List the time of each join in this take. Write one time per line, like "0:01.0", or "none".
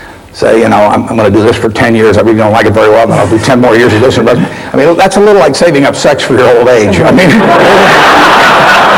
none